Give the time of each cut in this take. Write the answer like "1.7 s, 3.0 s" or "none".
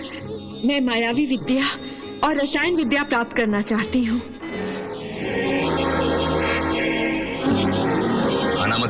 none